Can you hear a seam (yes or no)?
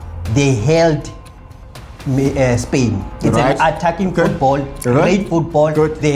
no